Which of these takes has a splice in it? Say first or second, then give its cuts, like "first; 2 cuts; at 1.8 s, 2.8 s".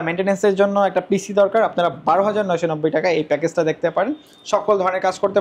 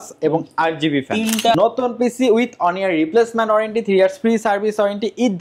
second; 1 cut; at 1.5 s